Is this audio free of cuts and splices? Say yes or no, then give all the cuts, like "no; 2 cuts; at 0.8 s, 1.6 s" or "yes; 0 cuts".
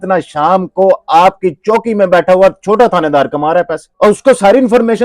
no; 1 cut; at 3.8 s